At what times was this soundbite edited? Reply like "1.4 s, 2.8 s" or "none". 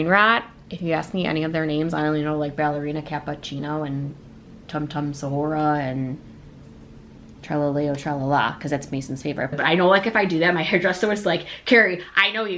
9.5 s